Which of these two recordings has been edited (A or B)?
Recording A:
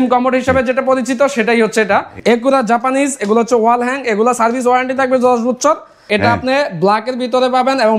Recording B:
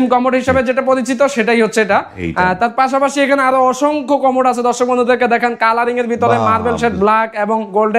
A